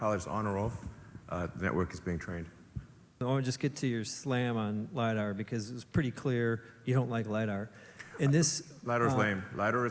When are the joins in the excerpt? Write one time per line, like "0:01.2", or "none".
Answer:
0:03.2